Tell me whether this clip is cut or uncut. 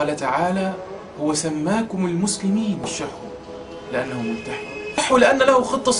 cut